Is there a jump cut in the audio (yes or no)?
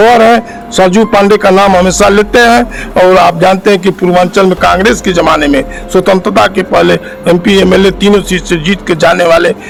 no